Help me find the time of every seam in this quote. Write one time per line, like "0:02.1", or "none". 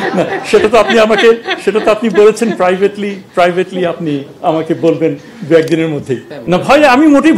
0:06.3